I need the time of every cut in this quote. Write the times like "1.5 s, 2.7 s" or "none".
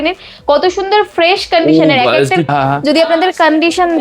2.5 s